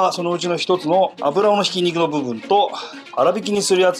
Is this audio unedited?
yes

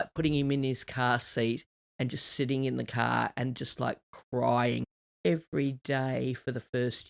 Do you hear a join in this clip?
yes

